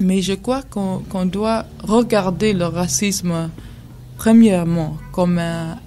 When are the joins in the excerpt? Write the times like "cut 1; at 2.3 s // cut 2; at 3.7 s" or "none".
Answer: cut 1; at 4.0 s